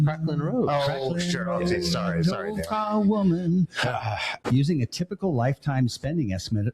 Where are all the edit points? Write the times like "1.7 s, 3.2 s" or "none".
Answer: 4.4 s

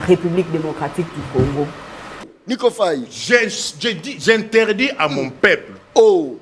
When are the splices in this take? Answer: 2.2 s

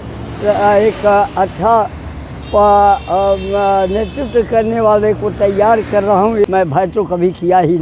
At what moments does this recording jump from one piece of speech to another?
6.5 s

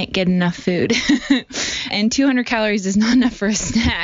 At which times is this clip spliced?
1.9 s

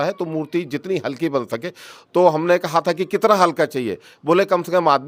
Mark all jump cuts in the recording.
none

